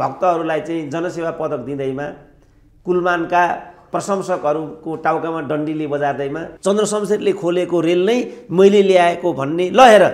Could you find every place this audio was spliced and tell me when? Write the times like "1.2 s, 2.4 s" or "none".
3.9 s, 6.5 s